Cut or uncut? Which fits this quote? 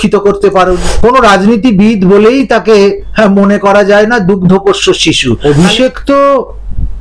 cut